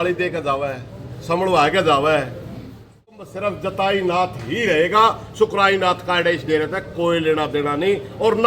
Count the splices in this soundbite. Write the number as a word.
one